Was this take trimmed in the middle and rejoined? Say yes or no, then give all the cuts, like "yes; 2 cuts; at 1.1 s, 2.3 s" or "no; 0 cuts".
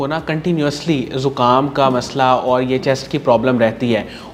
no; 0 cuts